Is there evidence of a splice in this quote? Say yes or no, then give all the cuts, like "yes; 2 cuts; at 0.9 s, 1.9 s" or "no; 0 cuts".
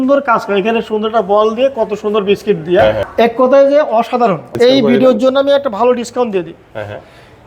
yes; 2 cuts; at 3.1 s, 4.4 s